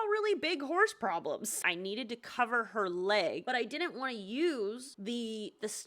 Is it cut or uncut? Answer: cut